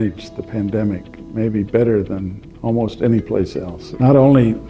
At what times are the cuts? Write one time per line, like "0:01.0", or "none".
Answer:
none